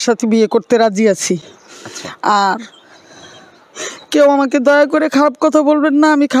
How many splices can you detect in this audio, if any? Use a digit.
0